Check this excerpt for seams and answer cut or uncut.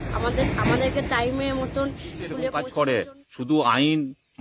cut